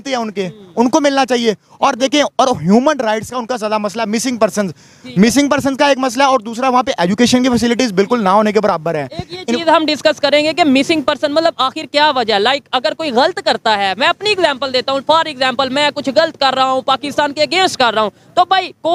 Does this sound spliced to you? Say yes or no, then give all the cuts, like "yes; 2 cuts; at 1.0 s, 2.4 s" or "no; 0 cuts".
no; 0 cuts